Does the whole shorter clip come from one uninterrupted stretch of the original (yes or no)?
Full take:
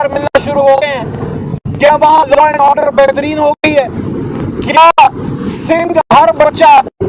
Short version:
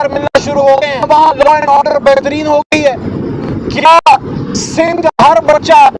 no